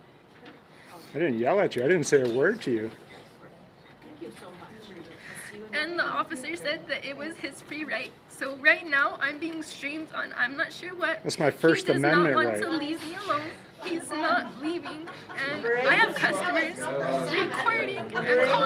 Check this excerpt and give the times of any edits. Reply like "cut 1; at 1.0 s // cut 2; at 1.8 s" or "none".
none